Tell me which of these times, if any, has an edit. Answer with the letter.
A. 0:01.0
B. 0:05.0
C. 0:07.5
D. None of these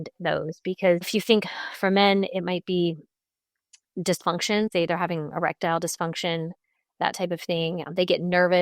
A